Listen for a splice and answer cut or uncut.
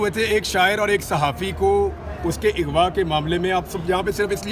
uncut